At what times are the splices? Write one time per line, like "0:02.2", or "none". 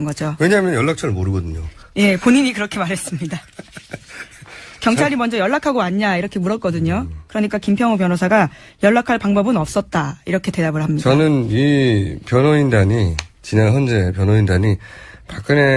0:09.9